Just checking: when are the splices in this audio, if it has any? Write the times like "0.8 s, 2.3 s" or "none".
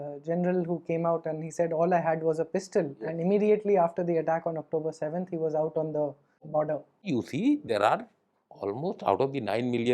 6.3 s, 7.1 s